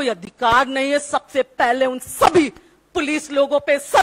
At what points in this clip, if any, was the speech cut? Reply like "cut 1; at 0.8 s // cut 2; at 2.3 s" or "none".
none